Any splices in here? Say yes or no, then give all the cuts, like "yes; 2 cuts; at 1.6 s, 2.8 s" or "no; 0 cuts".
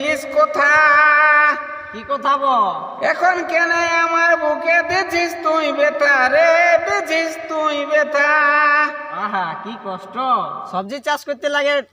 yes; 1 cut; at 10.6 s